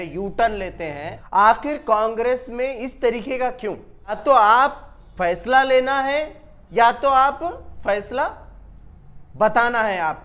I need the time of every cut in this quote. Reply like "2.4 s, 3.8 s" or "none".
1.1 s, 4.2 s

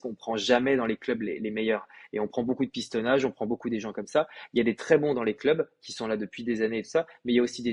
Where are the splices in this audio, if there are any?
none

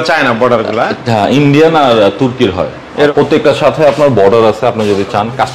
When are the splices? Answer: 3.1 s

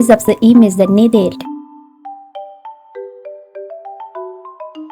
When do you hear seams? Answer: 1.4 s

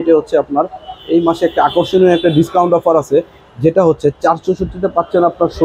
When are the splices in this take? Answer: none

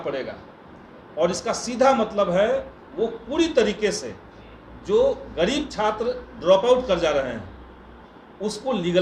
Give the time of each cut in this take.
2.8 s

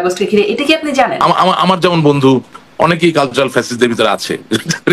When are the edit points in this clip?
1.1 s

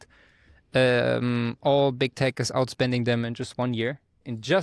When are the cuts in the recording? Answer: none

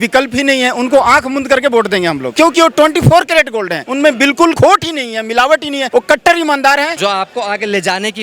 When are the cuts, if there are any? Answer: 2.2 s, 3.8 s, 4.6 s, 5.8 s, 6.9 s

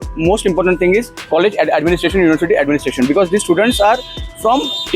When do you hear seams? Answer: 1.2 s

